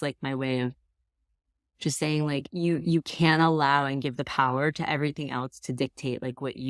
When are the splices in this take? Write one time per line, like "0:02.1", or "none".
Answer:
0:02.5